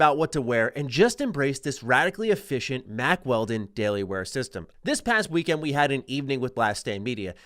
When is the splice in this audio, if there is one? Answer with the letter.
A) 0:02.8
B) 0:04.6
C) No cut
B